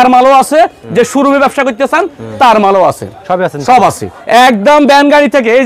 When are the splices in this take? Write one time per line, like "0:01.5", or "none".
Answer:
none

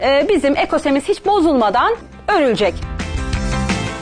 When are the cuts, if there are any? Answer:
0:02.1
0:02.9

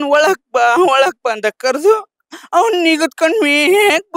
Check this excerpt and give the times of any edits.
none

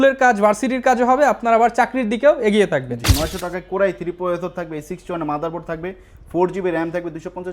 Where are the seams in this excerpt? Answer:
0:03.0

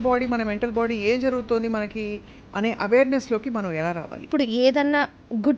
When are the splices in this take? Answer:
0:04.3

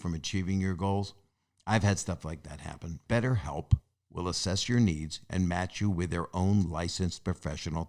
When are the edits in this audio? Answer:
0:02.9

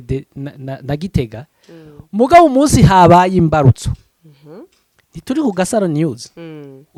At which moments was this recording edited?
none

